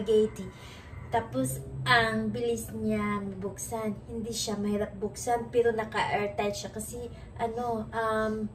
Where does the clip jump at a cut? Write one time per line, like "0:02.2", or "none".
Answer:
none